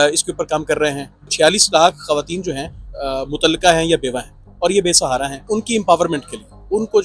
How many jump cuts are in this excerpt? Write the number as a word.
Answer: three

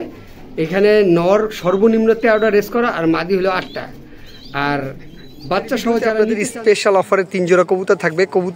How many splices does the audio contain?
one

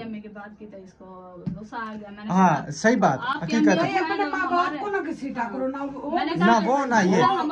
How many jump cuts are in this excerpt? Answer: zero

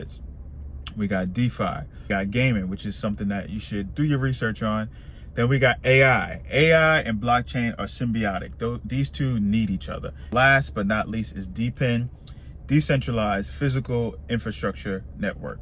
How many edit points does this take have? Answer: two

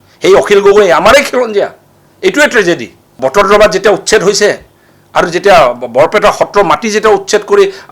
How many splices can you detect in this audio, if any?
one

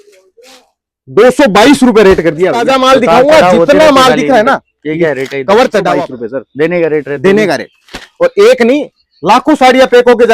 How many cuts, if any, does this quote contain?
two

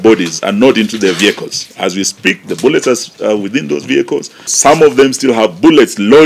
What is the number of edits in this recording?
one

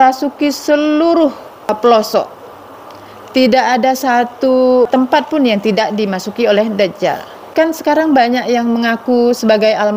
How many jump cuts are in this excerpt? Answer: three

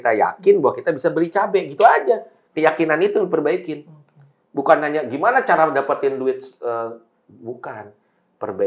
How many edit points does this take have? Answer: zero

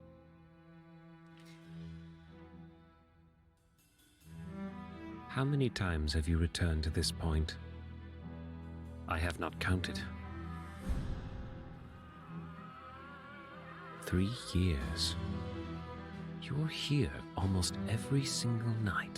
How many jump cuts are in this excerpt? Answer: one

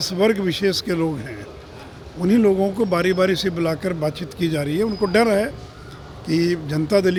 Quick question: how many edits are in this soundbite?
zero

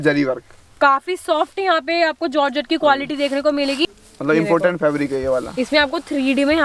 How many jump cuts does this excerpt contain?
one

